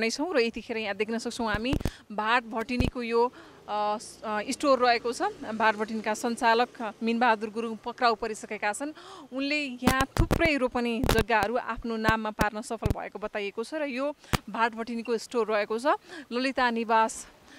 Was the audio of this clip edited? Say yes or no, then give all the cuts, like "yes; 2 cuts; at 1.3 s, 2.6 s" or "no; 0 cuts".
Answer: no; 0 cuts